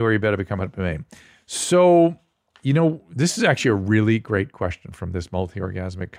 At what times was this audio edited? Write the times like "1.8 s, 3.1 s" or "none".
none

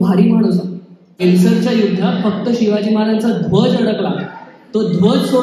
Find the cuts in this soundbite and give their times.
1.2 s

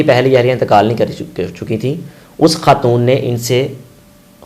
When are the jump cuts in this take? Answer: none

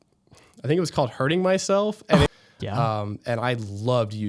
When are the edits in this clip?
2.3 s

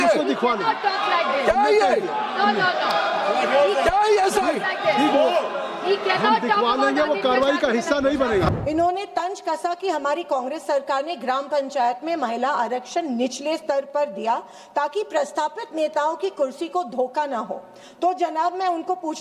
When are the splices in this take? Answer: 8.5 s

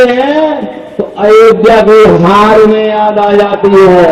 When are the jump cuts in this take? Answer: none

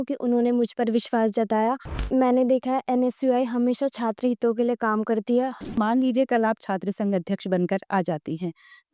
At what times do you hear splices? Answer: 2.1 s, 5.7 s

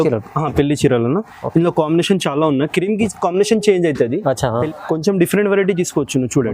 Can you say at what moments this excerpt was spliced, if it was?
4.6 s

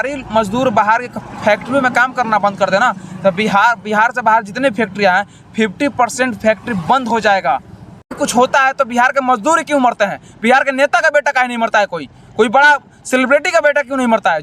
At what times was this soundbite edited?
8.1 s

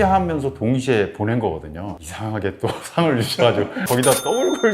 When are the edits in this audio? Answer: 2.0 s

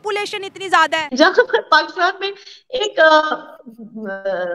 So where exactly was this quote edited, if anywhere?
1.1 s

